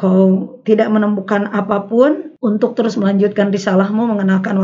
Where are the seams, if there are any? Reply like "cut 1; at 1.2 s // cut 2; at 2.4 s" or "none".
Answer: cut 1; at 2.3 s